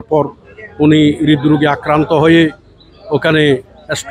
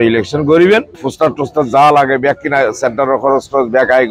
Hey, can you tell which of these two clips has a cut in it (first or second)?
second